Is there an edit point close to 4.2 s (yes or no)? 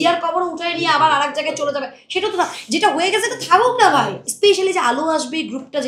yes